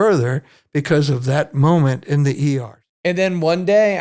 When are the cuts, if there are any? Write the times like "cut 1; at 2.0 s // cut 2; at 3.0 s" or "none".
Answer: cut 1; at 2.8 s